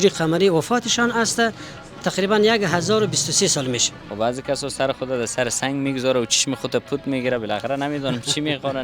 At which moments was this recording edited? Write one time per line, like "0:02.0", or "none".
0:04.0

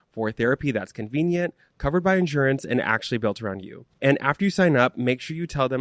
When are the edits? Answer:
none

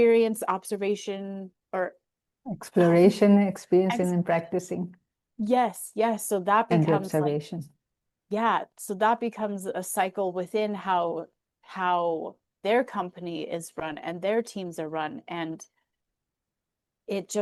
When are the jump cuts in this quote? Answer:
none

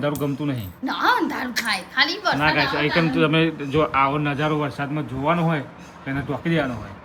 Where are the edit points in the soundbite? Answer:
none

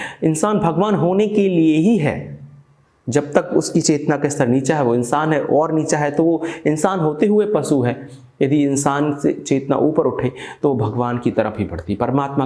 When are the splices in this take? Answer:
none

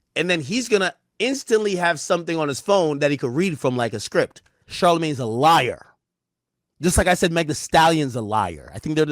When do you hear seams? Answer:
0:04.7

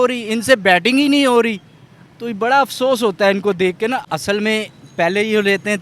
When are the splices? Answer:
0:04.0

